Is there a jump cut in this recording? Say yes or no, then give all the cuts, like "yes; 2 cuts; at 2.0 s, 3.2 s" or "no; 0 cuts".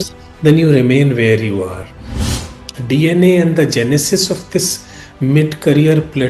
yes; 1 cut; at 2.2 s